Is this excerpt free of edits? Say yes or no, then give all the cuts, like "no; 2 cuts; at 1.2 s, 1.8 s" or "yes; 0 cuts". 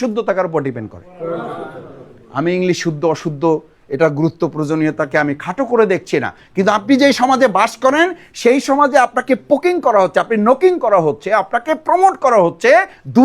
yes; 0 cuts